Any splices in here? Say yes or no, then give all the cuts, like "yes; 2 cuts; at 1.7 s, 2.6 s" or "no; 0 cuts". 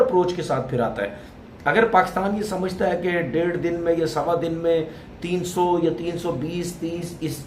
no; 0 cuts